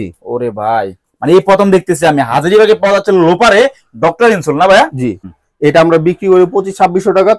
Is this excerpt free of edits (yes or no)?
no